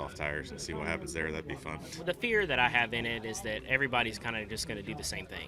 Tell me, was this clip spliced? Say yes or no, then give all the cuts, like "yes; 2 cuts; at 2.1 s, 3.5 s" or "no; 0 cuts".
yes; 1 cut; at 1.9 s